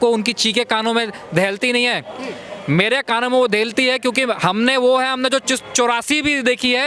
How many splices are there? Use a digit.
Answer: 0